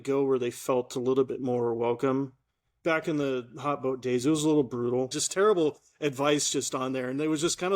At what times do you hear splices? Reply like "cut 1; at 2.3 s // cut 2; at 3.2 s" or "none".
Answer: cut 1; at 5.2 s